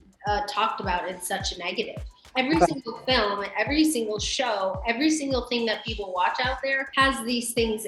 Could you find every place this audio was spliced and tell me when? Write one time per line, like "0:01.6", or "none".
0:06.8